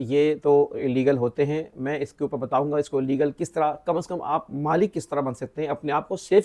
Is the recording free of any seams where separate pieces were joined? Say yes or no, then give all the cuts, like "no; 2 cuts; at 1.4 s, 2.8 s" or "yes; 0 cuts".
yes; 0 cuts